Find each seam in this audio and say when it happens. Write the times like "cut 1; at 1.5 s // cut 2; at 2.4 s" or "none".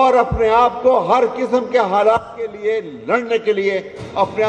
none